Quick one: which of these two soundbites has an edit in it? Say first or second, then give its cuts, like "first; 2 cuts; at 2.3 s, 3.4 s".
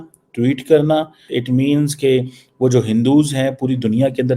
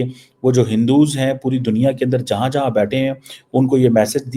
first; 1 cut; at 1.3 s